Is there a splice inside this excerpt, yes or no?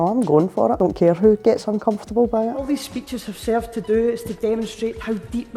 yes